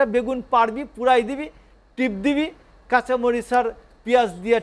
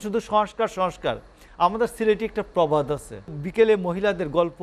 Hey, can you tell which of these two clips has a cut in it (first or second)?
second